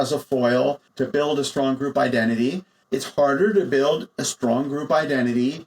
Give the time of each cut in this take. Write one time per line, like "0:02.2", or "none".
0:00.9
0:02.7